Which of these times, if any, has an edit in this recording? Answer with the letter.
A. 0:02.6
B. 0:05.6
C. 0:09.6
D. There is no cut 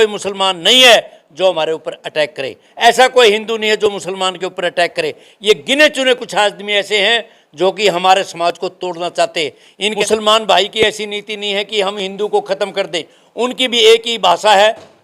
C